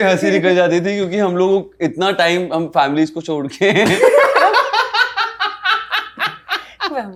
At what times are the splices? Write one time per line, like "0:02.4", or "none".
none